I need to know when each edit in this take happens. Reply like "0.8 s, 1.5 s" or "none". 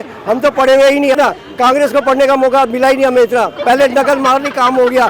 1.2 s